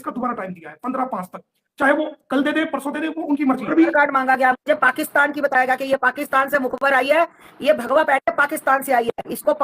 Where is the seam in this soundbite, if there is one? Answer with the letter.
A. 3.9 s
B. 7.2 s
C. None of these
A